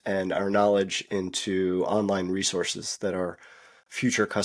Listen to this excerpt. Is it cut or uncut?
uncut